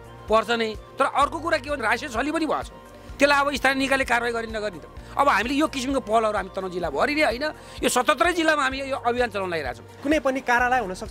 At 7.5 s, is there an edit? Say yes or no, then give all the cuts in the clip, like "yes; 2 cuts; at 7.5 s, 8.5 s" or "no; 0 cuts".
no; 1 cut; at 10.0 s